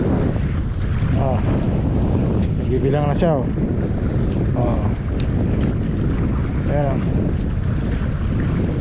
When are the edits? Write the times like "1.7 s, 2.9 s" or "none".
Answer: none